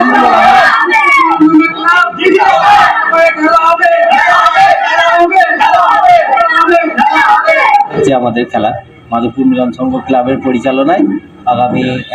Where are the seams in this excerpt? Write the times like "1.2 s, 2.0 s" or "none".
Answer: 8.0 s